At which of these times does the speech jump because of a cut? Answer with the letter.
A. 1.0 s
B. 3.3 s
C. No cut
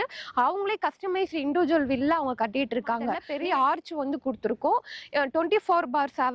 B